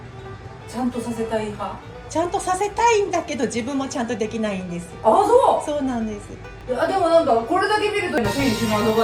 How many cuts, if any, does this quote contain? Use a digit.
0